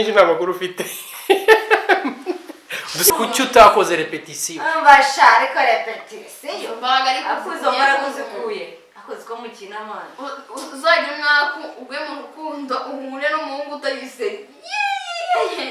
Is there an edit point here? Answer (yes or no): yes